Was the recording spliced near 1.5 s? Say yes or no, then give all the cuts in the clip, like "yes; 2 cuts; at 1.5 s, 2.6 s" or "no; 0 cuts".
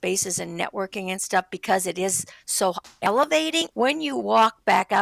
no; 1 cut; at 3.7 s